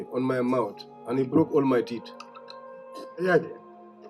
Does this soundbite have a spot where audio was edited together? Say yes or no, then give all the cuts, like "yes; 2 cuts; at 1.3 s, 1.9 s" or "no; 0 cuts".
no; 0 cuts